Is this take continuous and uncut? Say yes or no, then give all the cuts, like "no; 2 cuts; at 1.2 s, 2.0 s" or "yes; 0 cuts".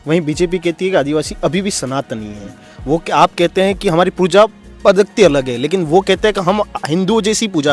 yes; 0 cuts